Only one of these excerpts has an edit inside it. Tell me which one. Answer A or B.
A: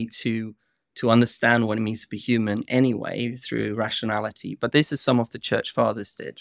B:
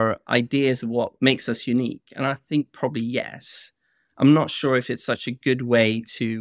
B